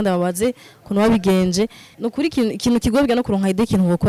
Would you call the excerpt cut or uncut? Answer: cut